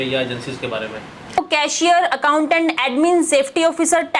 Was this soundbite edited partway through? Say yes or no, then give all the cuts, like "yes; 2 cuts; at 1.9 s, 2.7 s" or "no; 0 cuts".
yes; 1 cut; at 1.4 s